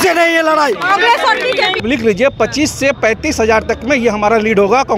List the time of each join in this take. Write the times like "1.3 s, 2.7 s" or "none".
1.8 s